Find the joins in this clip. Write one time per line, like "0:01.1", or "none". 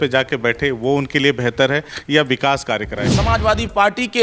0:03.1

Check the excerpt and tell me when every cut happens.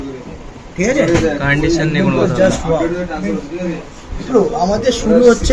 0:04.3

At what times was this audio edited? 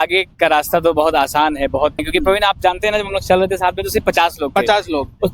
0:02.0

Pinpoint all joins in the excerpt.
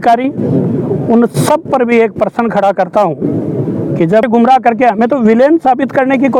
0:04.2

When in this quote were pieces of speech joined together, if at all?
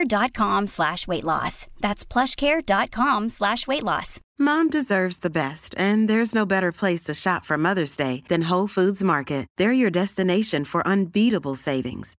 0:04.2

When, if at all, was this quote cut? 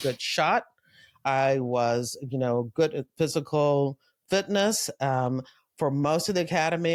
none

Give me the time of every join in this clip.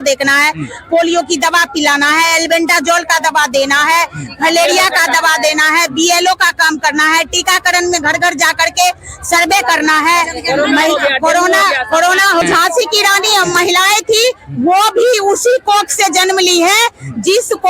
0:12.4

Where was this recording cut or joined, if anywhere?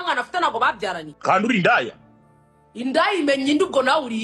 0:01.1

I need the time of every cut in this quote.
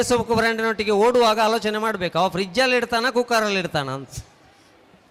none

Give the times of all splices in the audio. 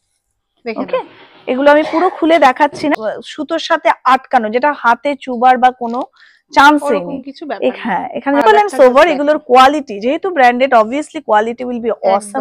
0:03.0
0:08.4

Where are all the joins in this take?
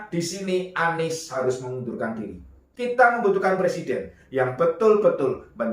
0:02.6

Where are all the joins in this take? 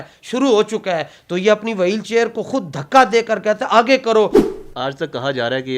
0:04.4

